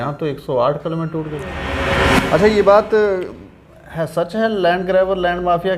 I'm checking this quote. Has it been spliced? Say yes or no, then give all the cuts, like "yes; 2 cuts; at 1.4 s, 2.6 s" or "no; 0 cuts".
yes; 1 cut; at 1.7 s